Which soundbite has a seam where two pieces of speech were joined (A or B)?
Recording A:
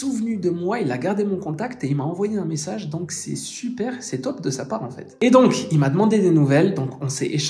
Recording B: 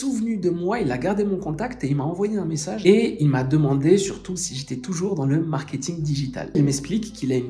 B